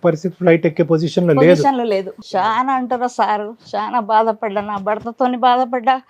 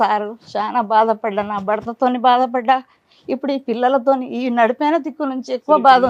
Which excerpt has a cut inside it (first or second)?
first